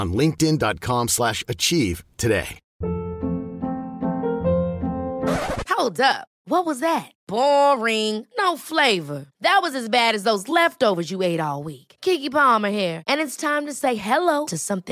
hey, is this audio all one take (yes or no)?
no